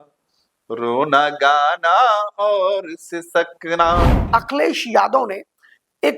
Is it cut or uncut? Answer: cut